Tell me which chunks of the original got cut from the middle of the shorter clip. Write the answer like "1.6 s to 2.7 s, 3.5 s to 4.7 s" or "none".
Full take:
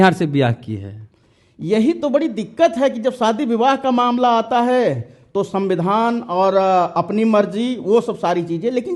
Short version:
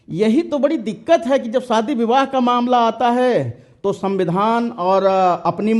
none